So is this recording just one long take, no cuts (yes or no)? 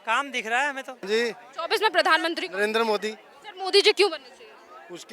no